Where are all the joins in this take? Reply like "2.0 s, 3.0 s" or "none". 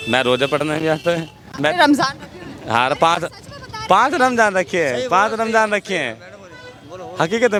none